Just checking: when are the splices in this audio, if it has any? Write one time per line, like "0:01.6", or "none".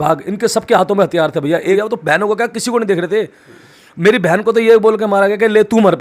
0:01.8